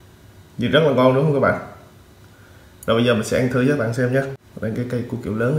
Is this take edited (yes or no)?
yes